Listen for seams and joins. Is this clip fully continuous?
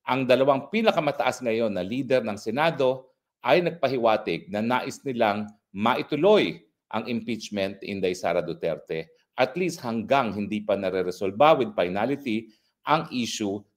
yes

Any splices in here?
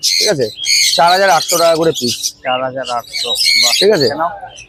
no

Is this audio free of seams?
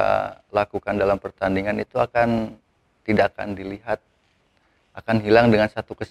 yes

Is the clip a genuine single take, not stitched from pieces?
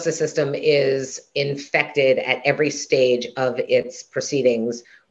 yes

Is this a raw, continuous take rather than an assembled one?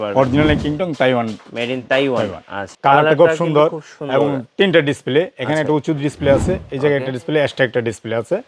no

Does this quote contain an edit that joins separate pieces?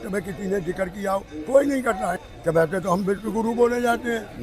yes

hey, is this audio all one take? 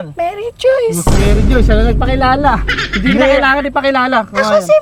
yes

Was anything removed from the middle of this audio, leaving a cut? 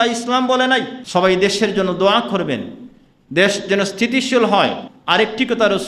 yes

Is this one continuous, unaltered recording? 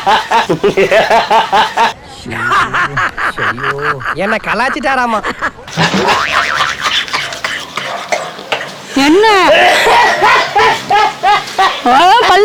yes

